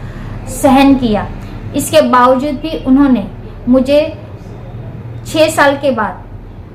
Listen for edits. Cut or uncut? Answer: uncut